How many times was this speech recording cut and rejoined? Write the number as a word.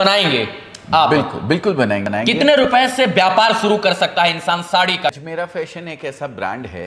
two